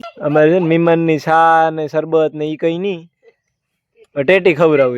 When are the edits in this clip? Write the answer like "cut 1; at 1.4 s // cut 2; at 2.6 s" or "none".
none